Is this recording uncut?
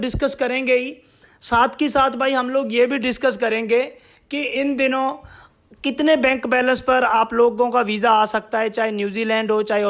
yes; 0 cuts

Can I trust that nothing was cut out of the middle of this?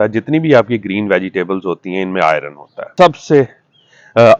no; 1 cut; at 2.8 s

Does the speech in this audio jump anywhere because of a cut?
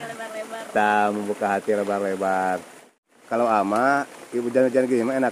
yes; 1 cut; at 2.8 s

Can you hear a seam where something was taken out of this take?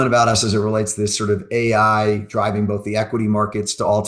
no; 0 cuts

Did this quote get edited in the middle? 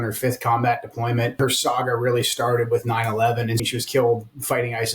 yes; 2 cuts; at 1.4 s, 3.6 s

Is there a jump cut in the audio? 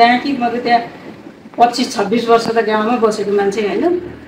no; 0 cuts

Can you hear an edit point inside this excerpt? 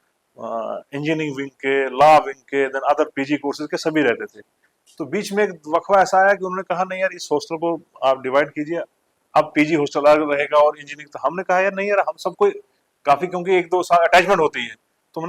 no; 0 cuts

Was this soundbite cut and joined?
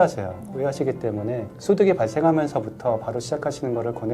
yes; 1 cut; at 1.5 s

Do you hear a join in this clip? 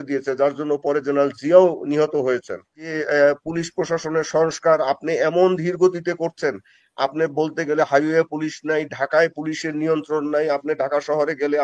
yes; 1 cut; at 2.9 s

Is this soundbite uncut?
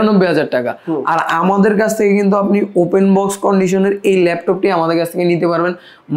yes; 0 cuts

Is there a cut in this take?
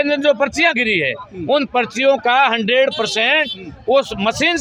no; 0 cuts

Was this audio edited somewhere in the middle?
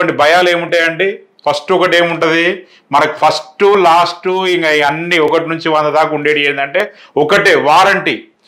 no; 0 cuts

